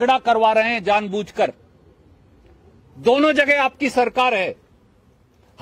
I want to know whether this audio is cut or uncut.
uncut